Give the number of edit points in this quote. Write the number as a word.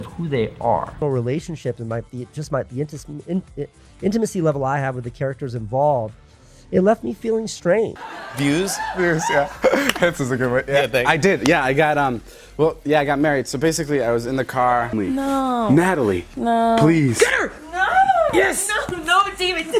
three